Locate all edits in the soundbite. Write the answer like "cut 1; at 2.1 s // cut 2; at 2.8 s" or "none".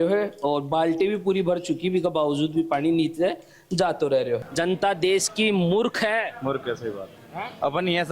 cut 1; at 4.4 s